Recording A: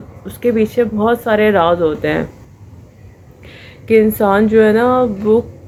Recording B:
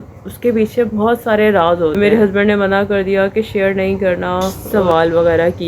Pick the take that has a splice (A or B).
B